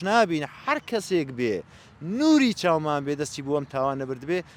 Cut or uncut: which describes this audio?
uncut